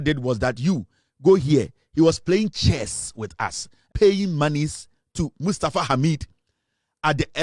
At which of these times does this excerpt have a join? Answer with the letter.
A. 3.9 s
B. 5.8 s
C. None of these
A